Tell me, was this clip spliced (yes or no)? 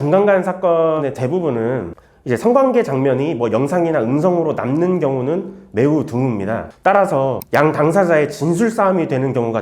yes